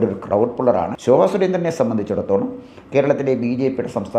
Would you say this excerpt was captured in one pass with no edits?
no; 1 cut; at 0.9 s

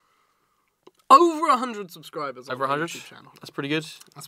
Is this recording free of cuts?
yes; 0 cuts

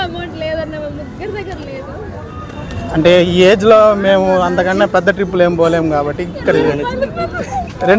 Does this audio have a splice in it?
no; 0 cuts

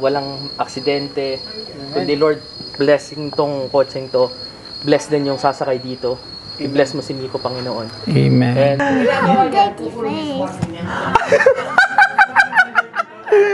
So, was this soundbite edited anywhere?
yes; 1 cut; at 8.8 s

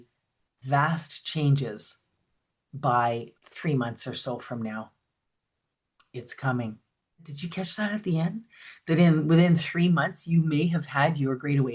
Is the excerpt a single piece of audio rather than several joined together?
no; 2 cuts; at 3.4 s, 7.4 s

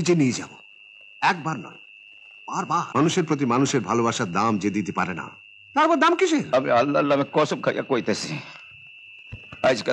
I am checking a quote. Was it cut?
yes; 2 cuts; at 2.9 s, 6.5 s

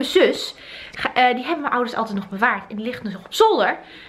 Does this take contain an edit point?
no; 0 cuts

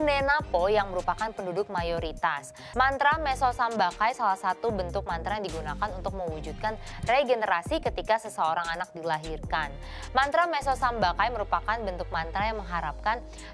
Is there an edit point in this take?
yes; 1 cut; at 2.5 s

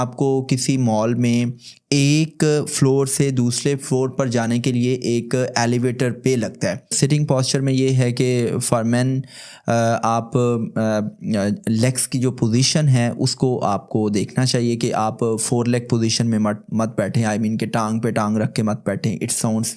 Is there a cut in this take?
yes; 1 cut; at 6.9 s

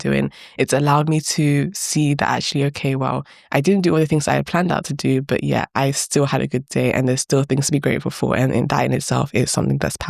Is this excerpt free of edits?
yes; 0 cuts

